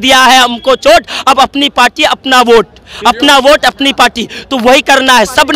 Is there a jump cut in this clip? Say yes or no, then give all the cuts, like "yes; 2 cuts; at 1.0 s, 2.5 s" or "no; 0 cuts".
no; 0 cuts